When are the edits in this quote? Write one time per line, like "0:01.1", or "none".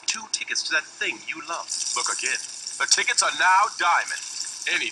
none